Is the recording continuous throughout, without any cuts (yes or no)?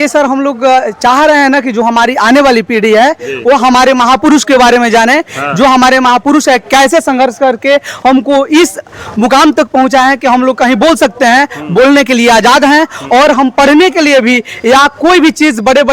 yes